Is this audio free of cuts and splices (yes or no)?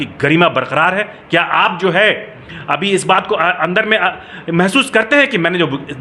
yes